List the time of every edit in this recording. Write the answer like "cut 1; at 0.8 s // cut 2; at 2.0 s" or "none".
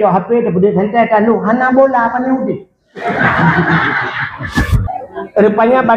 cut 1; at 4.8 s